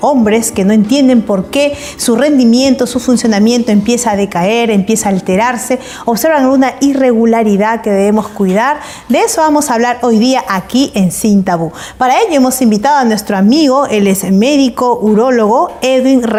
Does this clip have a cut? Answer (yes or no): no